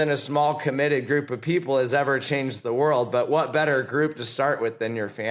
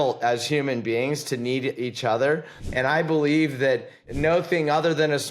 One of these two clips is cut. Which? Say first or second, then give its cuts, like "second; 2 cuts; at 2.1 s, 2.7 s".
second; 2 cuts; at 2.6 s, 4.0 s